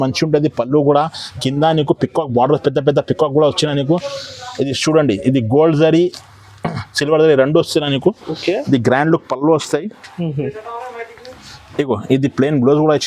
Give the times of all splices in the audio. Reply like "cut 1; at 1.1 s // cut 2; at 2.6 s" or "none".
none